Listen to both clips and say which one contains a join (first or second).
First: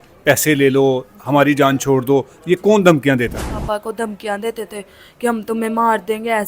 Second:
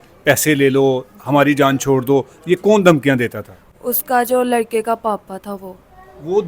first